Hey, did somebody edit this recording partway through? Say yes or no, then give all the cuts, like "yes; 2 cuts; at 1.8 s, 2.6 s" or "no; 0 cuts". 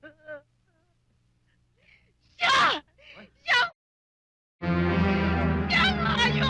no; 0 cuts